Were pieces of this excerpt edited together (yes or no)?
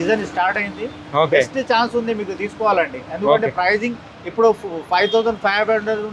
no